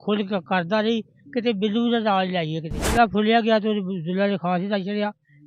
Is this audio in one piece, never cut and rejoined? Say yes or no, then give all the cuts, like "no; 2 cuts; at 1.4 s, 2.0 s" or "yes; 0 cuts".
no; 1 cut; at 2.9 s